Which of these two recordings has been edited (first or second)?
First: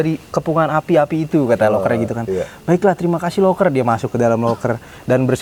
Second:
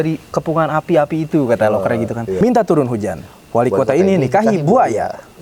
second